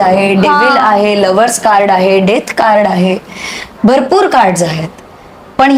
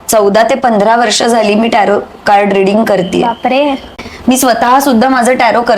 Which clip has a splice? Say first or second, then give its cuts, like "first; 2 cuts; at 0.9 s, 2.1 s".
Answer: second; 1 cut; at 4.0 s